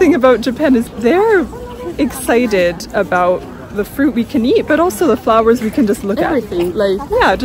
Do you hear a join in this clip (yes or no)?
yes